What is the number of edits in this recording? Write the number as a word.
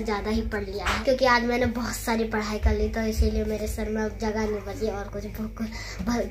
zero